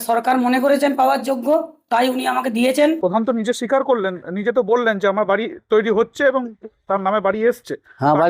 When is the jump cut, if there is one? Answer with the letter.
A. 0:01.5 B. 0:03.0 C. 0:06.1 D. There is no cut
B